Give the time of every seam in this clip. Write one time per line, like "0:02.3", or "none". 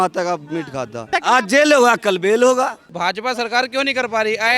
0:01.1
0:02.9